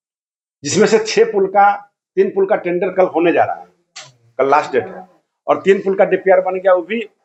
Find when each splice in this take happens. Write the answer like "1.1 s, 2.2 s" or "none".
none